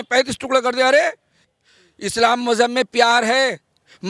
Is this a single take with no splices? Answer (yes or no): no